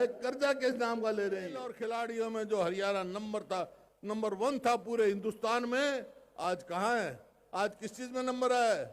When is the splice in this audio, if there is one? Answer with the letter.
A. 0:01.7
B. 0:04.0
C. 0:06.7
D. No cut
A